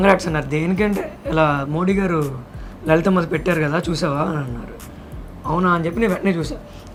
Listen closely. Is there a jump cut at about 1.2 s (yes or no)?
no